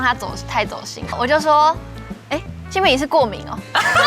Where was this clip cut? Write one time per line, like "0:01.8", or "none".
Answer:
0:01.1